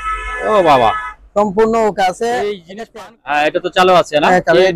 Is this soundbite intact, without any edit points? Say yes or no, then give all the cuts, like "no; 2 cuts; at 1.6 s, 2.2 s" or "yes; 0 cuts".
no; 1 cut; at 2.6 s